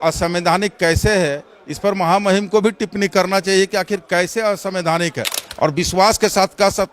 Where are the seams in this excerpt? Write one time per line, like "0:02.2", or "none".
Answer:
0:05.4